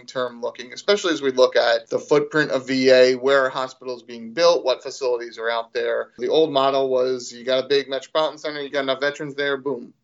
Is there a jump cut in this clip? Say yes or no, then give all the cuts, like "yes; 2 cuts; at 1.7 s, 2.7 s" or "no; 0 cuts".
yes; 3 cuts; at 1.9 s, 6.2 s, 8.7 s